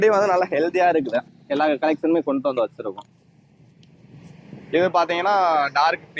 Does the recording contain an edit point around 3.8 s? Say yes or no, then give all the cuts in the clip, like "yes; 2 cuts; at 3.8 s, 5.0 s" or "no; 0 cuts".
no; 0 cuts